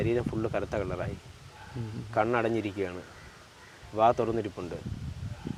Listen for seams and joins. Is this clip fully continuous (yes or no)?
yes